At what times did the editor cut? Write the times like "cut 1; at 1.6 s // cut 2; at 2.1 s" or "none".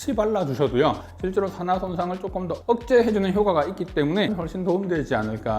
cut 1; at 4.3 s